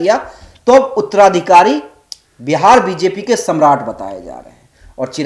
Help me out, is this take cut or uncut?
uncut